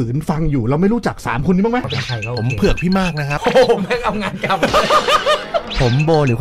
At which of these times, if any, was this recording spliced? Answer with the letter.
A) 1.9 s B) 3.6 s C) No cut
A